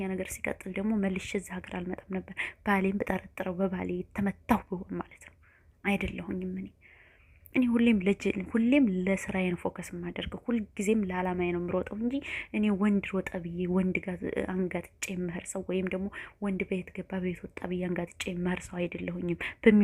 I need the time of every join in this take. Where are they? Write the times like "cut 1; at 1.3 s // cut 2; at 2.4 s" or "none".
none